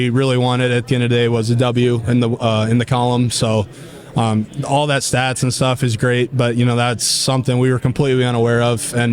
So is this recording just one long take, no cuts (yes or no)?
yes